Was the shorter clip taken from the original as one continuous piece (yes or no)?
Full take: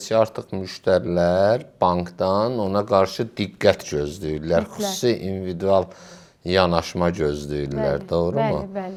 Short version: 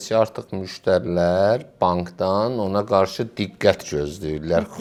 yes